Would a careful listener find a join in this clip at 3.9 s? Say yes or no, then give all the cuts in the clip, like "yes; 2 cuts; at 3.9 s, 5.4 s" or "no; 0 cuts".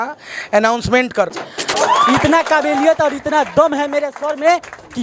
no; 1 cut; at 1.7 s